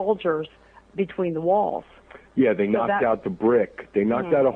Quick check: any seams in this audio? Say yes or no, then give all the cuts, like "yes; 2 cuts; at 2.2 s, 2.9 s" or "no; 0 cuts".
no; 0 cuts